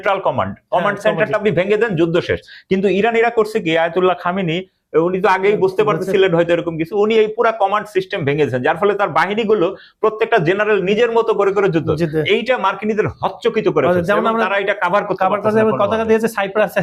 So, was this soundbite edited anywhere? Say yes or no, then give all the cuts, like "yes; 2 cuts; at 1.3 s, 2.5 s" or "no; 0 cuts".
no; 0 cuts